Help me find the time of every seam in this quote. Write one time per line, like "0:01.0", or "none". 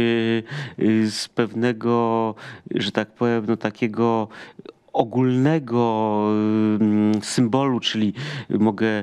none